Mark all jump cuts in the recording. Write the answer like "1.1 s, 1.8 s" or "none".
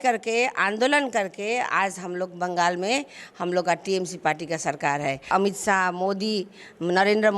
5.3 s